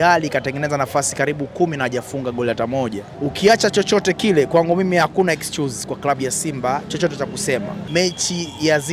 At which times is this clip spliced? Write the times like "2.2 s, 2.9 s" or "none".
3.1 s, 7.8 s